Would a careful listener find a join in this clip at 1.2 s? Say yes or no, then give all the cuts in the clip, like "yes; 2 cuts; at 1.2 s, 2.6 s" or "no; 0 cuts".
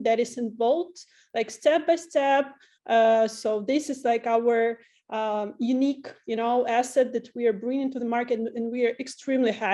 no; 0 cuts